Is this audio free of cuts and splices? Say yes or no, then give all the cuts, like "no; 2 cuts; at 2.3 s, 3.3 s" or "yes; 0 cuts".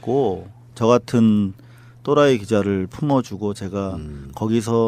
yes; 0 cuts